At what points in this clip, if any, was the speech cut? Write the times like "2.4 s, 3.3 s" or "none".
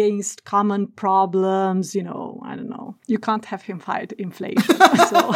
none